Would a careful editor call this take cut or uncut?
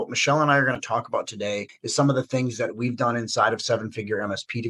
cut